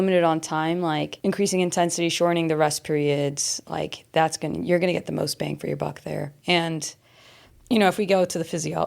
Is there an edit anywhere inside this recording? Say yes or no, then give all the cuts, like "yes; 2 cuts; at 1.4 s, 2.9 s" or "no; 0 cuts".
yes; 2 cuts; at 1.1 s, 6.3 s